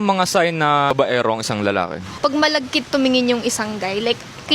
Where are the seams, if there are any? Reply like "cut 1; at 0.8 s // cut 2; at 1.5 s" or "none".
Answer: cut 1; at 0.9 s // cut 2; at 2.2 s